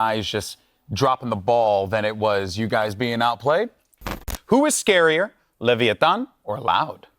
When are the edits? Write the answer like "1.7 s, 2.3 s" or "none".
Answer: 4.3 s